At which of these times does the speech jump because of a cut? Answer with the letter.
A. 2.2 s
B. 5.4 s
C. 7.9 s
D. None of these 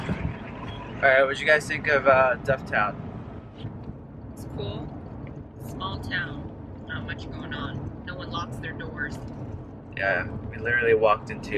D